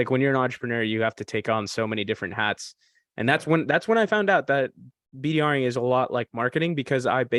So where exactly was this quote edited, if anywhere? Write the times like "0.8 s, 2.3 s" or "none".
none